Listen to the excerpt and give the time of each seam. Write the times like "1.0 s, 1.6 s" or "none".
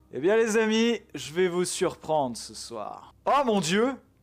3.0 s